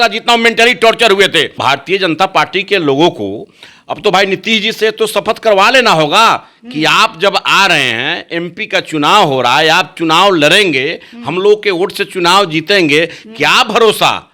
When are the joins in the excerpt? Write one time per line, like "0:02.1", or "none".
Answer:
0:01.6

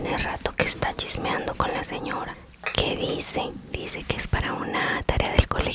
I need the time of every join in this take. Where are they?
0:02.4

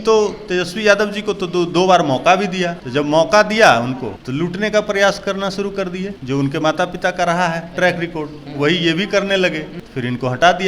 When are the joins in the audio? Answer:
0:02.8
0:04.1
0:06.1
0:09.8

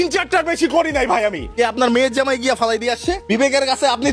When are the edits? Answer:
0:01.5
0:03.2

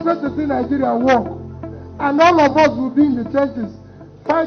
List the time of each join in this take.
none

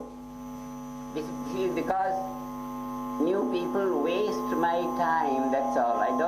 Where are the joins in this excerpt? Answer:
0:04.1

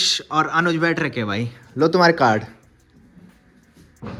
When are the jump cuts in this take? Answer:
none

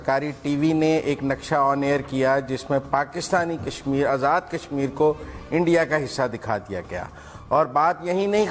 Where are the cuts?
none

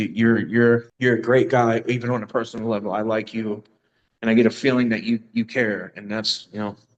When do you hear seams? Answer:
0:00.9

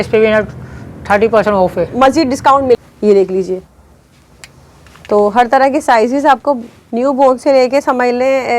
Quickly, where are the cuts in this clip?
0:02.8

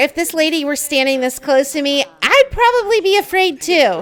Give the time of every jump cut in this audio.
none

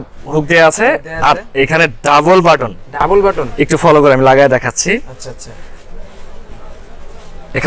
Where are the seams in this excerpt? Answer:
none

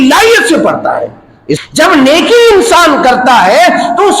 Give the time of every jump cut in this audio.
0:01.6

